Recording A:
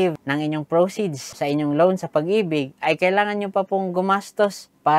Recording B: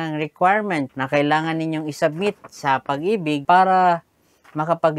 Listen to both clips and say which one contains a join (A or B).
B